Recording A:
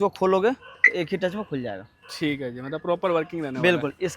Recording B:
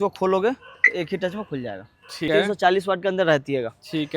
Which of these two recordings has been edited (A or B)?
B